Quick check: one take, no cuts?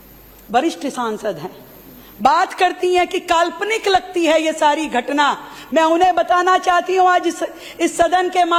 yes; 0 cuts

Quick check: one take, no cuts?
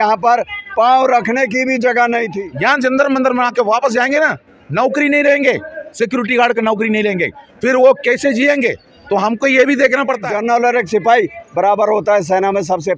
no; 2 cuts; at 2.3 s, 10.2 s

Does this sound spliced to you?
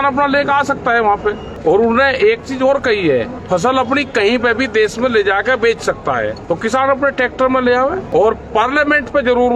yes; 4 cuts; at 1.5 s, 3.4 s, 6.4 s, 8.0 s

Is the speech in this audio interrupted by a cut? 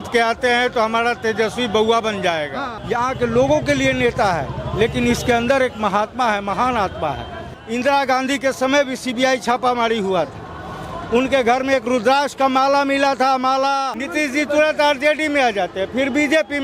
yes; 3 cuts; at 2.7 s, 7.5 s, 14.0 s

